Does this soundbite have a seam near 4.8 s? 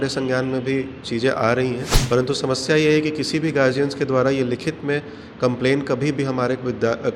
no; 1 cut; at 1.9 s

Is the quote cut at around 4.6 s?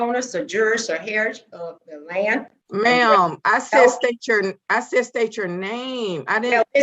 no; 1 cut; at 2.6 s

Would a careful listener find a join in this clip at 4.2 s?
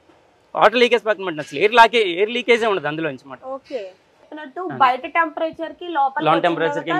yes; 1 cut; at 4.2 s

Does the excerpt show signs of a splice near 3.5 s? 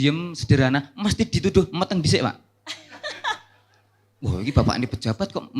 no; 0 cuts

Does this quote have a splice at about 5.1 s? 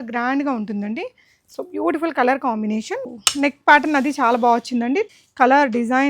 yes; 2 cuts; at 3.0 s, 5.1 s

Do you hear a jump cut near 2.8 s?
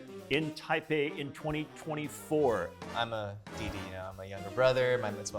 yes; 1 cut; at 2.8 s

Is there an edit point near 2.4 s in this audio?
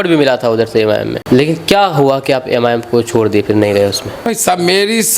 no; 2 cuts; at 1.1 s, 4.3 s

